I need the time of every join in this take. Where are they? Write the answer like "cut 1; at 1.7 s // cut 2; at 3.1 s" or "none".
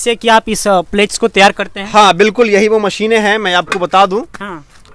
none